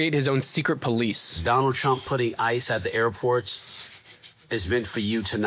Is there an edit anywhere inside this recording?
yes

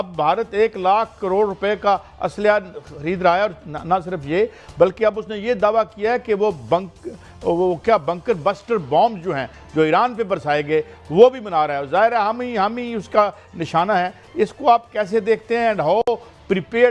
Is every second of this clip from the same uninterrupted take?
yes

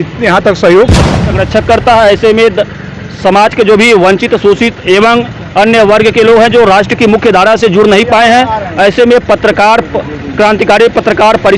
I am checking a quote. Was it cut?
yes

